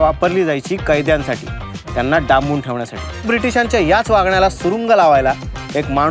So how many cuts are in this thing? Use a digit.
1